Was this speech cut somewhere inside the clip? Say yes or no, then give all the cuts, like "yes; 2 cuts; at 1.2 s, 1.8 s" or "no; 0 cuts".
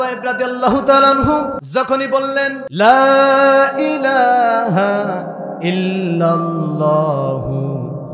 yes; 2 cuts; at 1.6 s, 2.6 s